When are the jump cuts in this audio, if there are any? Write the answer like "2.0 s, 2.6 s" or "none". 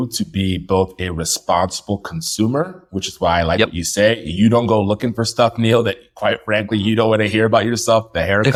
none

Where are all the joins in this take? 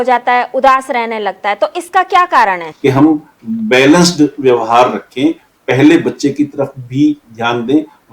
2.7 s

